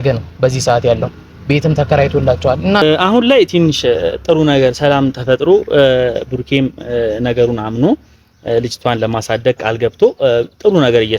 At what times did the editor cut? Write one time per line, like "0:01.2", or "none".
0:02.8